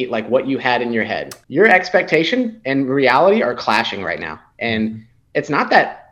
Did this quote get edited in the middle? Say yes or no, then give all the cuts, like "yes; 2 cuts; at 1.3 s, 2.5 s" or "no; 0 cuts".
yes; 1 cut; at 1.3 s